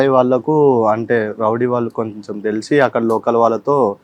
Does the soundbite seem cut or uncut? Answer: uncut